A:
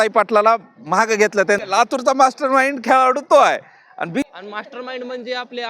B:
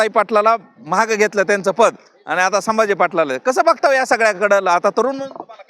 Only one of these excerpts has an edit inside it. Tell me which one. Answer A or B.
A